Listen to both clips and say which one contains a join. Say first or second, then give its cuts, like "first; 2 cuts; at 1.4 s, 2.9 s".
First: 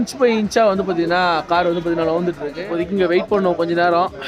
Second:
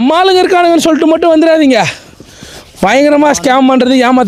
first; 1 cut; at 2.5 s